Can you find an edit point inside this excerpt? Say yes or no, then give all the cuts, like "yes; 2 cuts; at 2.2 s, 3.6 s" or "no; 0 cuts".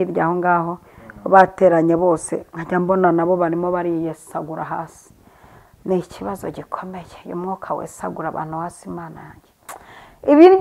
no; 0 cuts